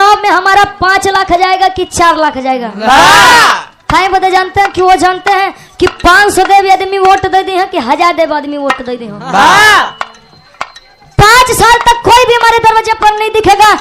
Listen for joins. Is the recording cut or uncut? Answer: uncut